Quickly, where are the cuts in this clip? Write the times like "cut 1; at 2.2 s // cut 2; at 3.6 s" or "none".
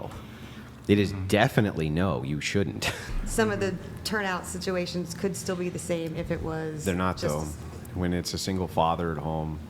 cut 1; at 3.1 s